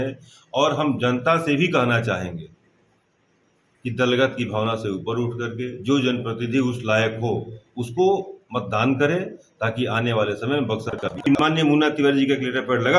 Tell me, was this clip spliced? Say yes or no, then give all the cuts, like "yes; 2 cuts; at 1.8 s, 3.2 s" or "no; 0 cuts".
yes; 1 cut; at 11.4 s